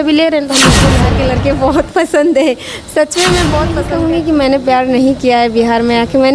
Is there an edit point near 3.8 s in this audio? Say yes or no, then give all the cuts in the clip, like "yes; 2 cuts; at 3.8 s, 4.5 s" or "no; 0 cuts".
yes; 2 cuts; at 0.9 s, 3.8 s